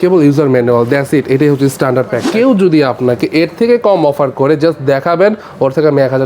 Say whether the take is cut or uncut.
cut